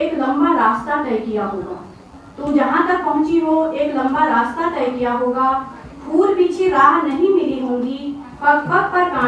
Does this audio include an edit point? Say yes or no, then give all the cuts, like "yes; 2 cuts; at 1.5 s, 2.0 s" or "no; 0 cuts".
no; 0 cuts